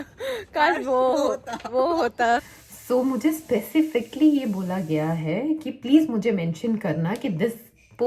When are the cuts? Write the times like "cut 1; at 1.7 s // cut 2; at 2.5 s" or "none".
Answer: cut 1; at 2.5 s